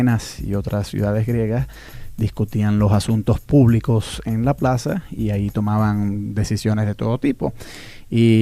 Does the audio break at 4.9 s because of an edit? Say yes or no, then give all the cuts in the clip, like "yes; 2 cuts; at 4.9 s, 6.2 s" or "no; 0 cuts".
yes; 1 cut; at 4.9 s